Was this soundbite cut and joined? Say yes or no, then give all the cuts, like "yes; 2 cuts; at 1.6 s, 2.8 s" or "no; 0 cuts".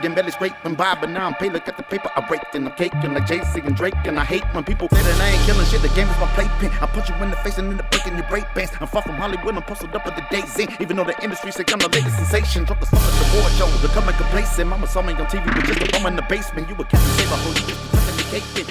no; 0 cuts